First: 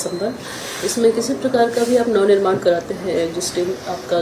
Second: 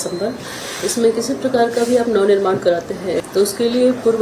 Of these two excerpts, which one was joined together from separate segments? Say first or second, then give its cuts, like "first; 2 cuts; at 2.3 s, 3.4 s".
second; 1 cut; at 3.2 s